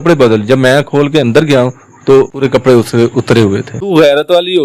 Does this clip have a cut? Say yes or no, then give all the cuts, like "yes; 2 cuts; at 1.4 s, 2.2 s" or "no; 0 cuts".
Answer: yes; 2 cuts; at 2.5 s, 3.7 s